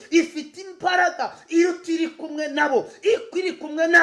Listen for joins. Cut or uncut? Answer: uncut